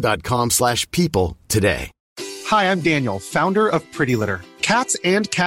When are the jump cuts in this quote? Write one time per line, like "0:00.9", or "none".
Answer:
0:01.9